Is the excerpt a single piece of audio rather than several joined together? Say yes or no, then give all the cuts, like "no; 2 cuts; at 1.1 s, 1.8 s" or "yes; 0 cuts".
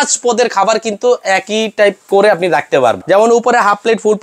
no; 1 cut; at 3.0 s